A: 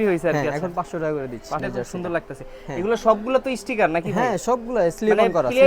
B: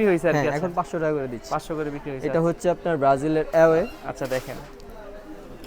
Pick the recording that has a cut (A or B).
A